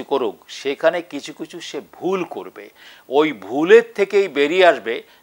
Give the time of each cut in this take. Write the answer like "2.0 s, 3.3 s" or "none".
none